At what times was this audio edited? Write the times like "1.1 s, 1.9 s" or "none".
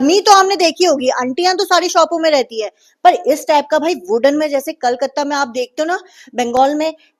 none